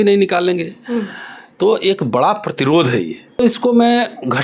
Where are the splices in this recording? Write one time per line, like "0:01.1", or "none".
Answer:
0:03.4